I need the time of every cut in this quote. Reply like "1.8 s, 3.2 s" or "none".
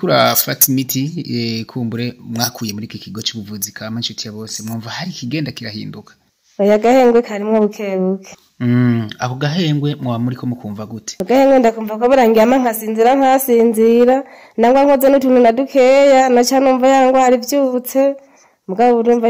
none